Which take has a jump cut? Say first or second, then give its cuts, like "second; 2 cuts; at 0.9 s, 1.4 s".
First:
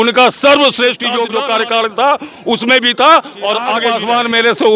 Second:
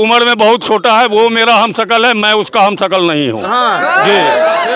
first; 2 cuts; at 1.3 s, 3.8 s